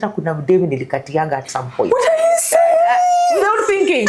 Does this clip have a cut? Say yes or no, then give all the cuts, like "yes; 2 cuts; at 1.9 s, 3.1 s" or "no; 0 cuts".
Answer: no; 0 cuts